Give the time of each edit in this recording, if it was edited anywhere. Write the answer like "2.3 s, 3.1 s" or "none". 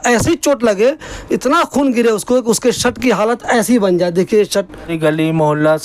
4.9 s